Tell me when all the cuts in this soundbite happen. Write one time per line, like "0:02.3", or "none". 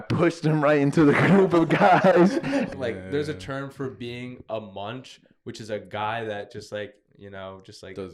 0:02.7